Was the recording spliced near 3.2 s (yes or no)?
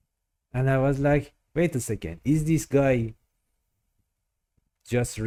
no